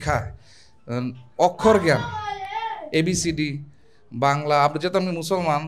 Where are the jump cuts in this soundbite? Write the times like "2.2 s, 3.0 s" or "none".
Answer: none